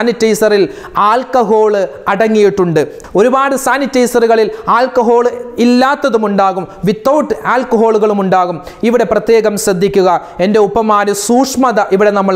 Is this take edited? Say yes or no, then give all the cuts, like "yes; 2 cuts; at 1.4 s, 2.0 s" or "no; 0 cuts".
no; 0 cuts